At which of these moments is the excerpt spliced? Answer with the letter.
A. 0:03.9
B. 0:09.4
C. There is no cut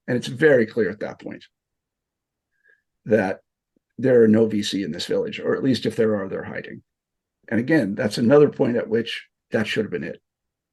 B